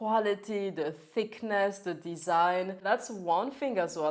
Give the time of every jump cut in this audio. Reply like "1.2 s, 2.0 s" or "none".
2.8 s

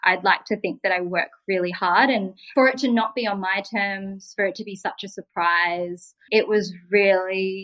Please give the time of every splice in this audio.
2.4 s

